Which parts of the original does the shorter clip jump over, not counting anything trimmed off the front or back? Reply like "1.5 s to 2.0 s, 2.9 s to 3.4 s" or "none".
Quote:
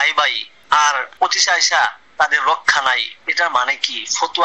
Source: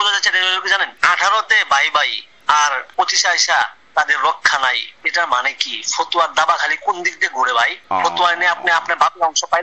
none

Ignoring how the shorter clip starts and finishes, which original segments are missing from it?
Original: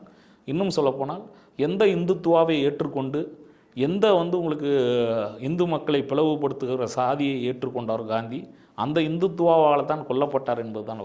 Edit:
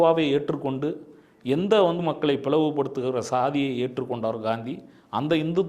4.3 s to 5.7 s

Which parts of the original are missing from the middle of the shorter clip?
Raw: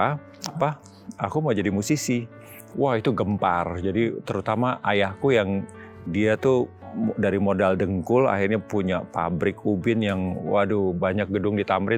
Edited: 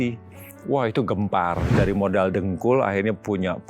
3.8 s to 7.1 s

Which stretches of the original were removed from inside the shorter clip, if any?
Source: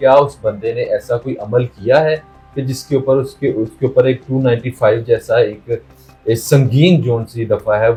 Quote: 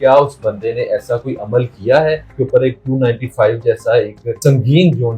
2.3 s to 3.7 s, 5.8 s to 6.4 s

